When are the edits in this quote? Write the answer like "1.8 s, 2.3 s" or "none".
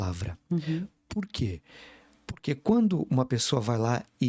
none

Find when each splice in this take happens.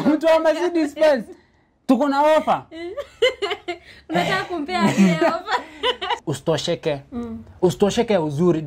6.1 s

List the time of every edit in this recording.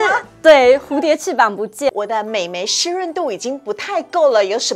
1.9 s

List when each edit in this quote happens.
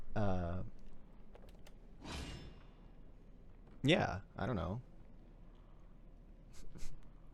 none

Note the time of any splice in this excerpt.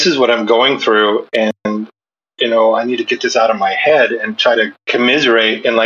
4.8 s

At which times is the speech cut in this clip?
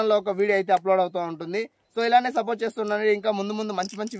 1.8 s

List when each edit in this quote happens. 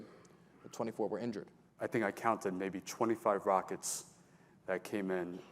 1.6 s

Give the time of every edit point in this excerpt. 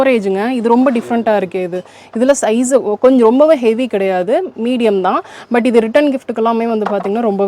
none

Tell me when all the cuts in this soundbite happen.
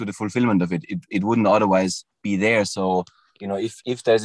2.1 s

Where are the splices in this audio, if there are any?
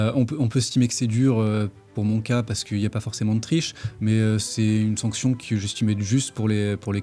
none

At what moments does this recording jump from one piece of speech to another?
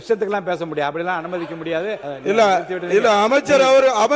2.1 s

